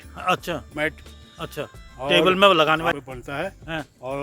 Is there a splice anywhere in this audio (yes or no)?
yes